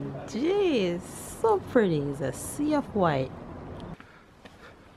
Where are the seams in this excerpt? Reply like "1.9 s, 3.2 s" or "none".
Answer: 3.9 s

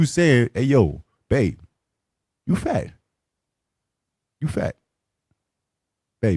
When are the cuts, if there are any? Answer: none

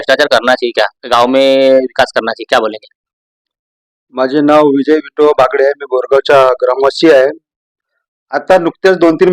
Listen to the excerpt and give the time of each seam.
none

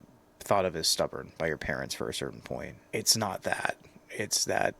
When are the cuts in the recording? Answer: 2.8 s

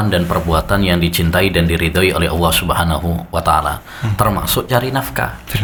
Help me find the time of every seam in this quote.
none

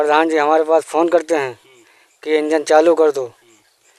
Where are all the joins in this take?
none

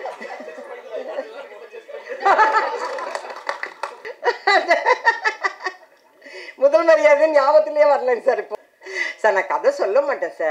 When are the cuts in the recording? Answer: 4.0 s, 8.5 s

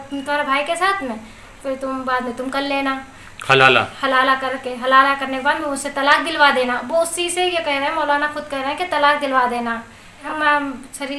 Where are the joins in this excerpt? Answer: 10.3 s

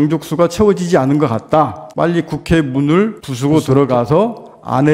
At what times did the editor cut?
1.8 s, 3.2 s

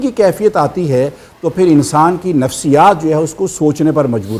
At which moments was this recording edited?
none

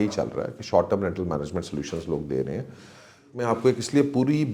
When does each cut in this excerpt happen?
3.3 s

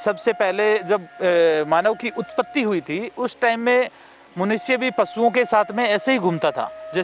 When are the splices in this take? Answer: none

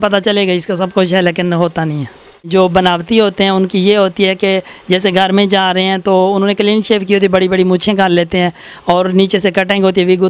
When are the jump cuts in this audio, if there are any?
2.5 s

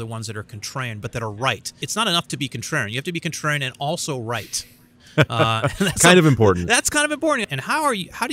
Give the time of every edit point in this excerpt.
1.8 s, 7.4 s

